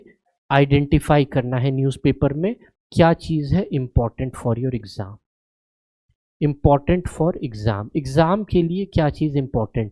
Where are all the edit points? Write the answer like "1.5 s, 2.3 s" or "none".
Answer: none